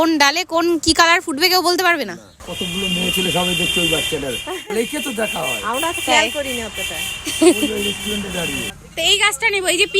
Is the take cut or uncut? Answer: cut